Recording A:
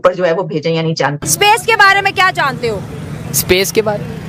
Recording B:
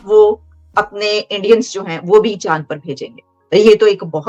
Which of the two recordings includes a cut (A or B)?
A